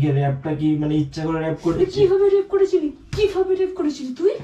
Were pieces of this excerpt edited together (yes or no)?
no